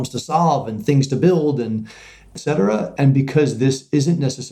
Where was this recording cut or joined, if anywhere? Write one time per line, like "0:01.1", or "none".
0:02.3